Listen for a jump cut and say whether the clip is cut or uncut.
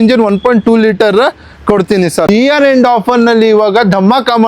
cut